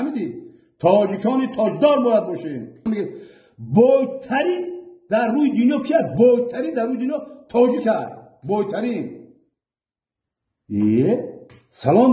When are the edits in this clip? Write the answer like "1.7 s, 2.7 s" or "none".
2.9 s